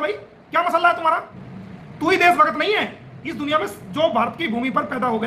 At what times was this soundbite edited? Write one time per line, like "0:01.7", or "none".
none